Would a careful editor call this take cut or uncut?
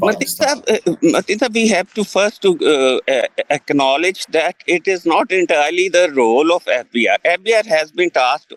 uncut